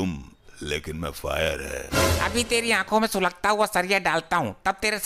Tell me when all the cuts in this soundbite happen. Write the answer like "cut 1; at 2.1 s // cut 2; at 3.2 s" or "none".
none